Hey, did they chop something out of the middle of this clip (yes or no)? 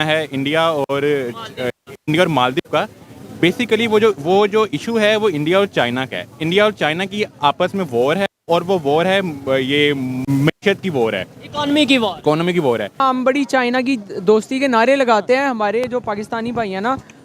yes